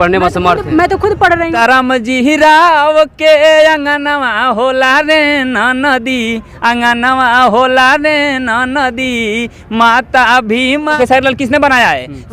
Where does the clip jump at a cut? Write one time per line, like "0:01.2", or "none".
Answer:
0:01.5
0:11.0